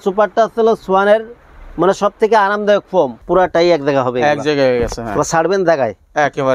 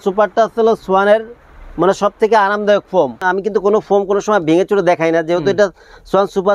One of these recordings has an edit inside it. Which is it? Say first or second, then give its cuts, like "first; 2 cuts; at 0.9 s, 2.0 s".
first; 1 cut; at 3.2 s